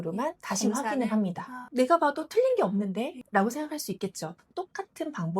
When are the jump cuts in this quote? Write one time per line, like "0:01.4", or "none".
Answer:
0:03.2